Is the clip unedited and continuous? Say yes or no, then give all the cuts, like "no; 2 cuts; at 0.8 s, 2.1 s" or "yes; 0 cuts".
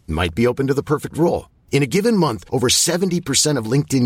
yes; 0 cuts